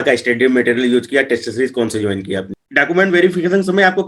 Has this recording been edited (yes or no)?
yes